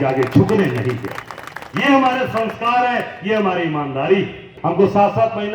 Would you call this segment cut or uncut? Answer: cut